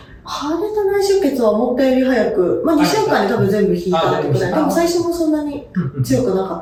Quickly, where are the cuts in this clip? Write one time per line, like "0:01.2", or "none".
none